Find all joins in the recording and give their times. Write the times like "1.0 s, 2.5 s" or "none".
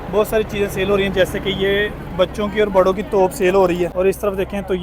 3.9 s